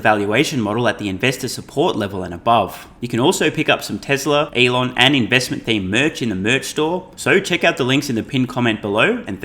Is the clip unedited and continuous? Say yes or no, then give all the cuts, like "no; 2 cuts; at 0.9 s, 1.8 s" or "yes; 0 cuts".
no; 3 cuts; at 2.9 s, 4.5 s, 7.1 s